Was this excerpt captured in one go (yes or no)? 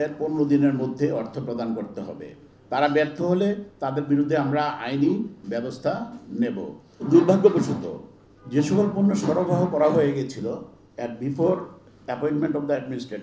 no